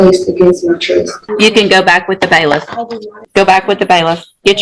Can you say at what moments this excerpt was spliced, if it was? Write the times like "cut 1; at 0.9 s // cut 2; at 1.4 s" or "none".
cut 1; at 1.2 s // cut 2; at 3.2 s

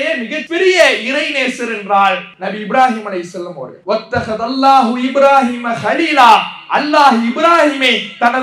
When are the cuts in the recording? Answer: cut 1; at 2.3 s

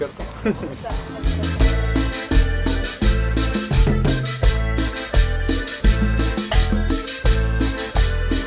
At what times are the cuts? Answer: cut 1; at 1.1 s

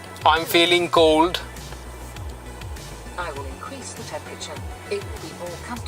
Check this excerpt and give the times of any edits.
none

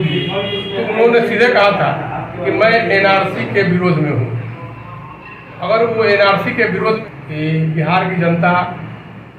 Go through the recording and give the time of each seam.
cut 1; at 7.0 s

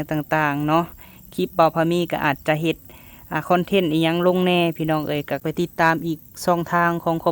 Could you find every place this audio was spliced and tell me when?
cut 1; at 5.4 s

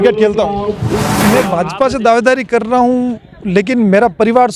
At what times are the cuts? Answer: cut 1; at 1.1 s

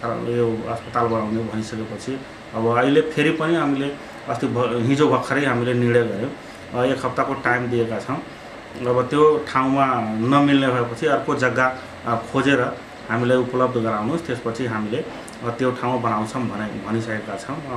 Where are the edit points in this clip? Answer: none

